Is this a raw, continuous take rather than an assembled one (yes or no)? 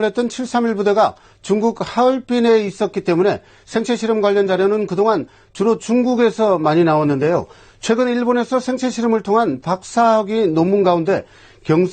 no